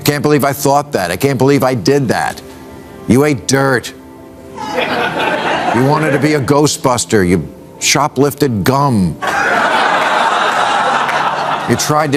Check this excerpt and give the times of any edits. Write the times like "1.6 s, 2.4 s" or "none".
none